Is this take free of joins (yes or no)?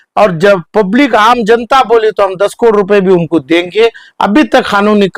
yes